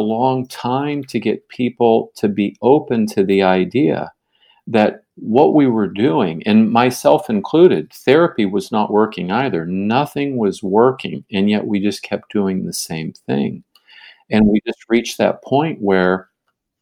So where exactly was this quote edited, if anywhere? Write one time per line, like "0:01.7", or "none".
none